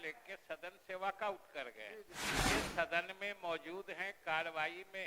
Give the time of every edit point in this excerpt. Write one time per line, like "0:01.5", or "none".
0:02.2